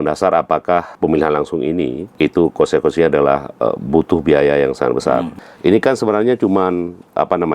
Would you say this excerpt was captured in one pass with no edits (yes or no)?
no